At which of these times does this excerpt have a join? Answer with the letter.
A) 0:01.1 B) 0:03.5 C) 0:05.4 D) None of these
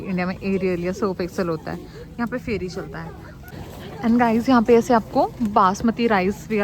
B